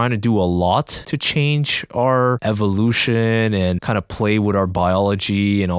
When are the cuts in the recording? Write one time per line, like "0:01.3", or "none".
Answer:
0:01.0
0:02.4
0:03.8